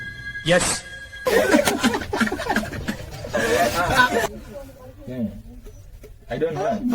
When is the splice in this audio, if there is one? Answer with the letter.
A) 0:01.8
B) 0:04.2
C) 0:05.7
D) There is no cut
B